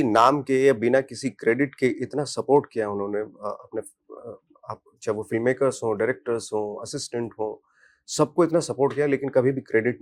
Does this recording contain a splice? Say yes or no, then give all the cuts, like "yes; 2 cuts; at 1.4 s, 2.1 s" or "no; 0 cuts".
no; 0 cuts